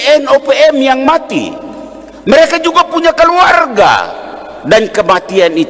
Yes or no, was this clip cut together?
no